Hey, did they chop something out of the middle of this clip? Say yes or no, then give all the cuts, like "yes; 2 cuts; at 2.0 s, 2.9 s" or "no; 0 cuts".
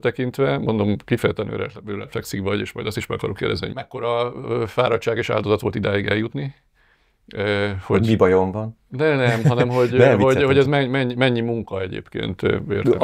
yes; 1 cut; at 3.7 s